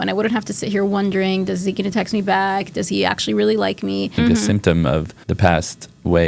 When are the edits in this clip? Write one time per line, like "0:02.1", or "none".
0:04.1
0:05.2